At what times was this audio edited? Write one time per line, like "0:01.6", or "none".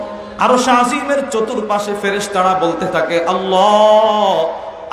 none